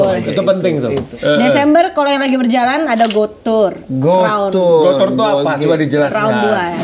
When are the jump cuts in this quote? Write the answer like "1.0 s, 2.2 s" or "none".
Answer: 1.1 s